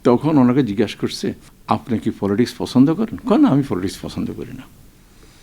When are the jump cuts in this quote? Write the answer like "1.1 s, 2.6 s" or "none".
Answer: 1.5 s